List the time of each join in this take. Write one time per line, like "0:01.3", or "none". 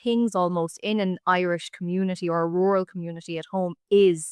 none